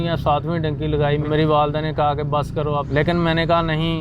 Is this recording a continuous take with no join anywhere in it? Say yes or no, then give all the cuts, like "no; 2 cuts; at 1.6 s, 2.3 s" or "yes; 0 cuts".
no; 2 cuts; at 1.2 s, 2.9 s